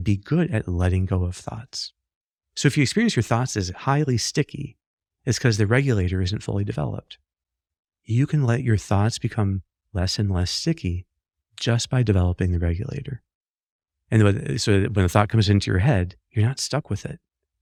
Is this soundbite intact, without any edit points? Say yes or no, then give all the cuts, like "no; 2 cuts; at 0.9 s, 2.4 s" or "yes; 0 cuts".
yes; 0 cuts